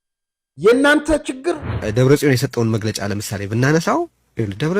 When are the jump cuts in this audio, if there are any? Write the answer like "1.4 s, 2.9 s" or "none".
1.7 s